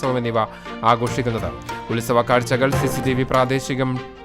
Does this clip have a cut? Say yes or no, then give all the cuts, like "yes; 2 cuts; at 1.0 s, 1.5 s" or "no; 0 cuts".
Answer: no; 0 cuts